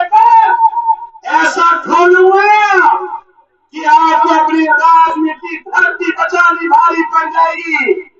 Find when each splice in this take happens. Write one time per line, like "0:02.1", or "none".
none